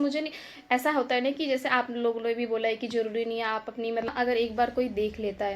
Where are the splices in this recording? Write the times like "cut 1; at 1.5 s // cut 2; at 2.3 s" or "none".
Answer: cut 1; at 4.1 s

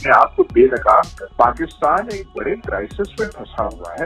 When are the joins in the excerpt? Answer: cut 1; at 1.2 s

